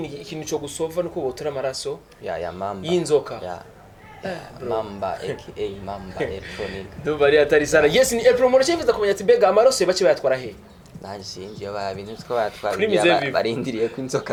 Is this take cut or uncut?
uncut